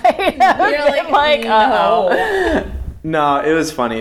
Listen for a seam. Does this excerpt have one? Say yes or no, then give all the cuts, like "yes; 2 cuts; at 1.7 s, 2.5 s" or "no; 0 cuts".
no; 0 cuts